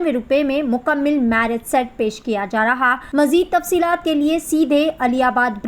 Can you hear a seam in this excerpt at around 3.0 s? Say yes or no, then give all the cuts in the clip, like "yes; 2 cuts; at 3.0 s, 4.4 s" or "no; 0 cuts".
yes; 1 cut; at 3.0 s